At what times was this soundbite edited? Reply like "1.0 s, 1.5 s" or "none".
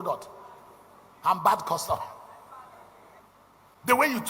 3.2 s